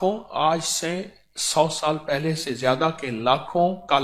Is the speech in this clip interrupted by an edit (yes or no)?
no